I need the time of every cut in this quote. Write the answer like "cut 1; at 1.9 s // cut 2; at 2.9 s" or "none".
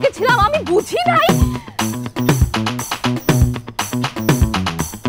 cut 1; at 1.3 s